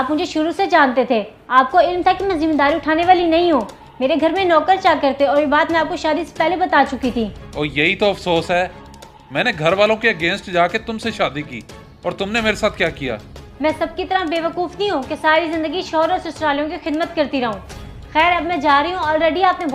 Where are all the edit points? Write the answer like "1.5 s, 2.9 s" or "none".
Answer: 16.3 s